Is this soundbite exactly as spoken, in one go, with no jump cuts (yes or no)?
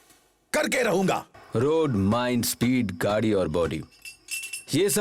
no